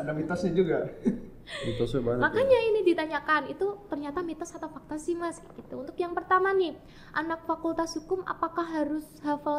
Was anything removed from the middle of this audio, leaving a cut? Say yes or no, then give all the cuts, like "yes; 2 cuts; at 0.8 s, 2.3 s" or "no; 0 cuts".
no; 0 cuts